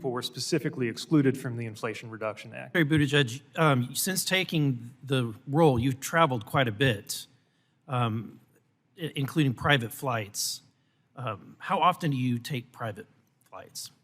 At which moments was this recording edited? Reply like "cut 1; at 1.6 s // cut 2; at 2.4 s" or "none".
cut 1; at 2.7 s

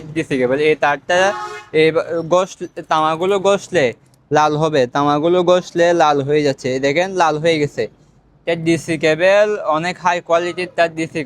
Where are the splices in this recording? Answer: none

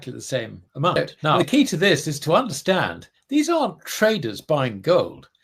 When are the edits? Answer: cut 1; at 1.2 s

